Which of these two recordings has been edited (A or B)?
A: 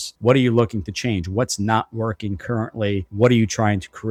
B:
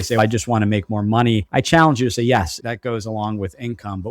B